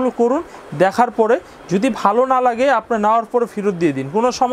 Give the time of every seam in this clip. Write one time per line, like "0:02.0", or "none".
none

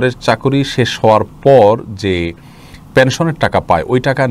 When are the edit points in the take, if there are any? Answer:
none

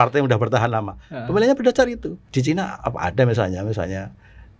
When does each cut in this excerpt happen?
0:02.1

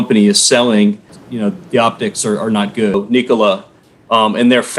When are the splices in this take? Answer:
0:01.1
0:02.9

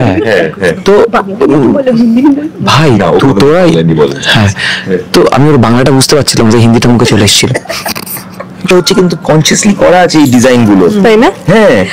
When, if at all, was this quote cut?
0:08.7

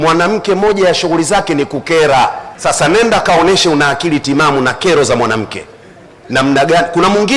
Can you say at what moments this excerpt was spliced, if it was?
0:02.5

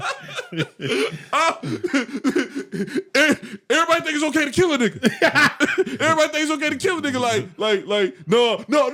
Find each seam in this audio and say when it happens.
none

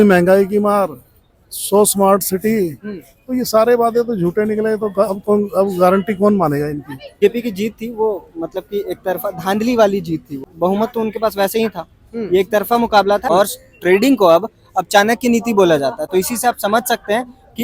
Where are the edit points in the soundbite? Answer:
0:07.2
0:10.4
0:13.2

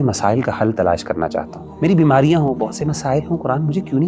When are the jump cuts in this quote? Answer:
0:01.6

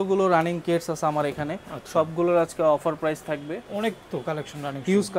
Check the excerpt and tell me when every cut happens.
none

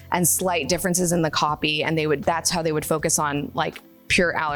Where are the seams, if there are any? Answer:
none

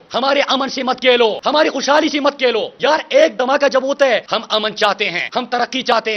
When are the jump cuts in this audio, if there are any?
0:04.2

